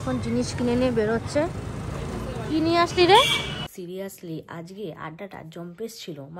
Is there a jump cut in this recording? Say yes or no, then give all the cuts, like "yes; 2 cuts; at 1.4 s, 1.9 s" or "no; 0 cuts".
yes; 1 cut; at 3.7 s